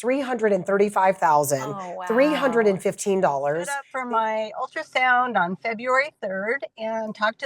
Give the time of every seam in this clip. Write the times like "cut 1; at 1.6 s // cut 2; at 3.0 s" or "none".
cut 1; at 3.9 s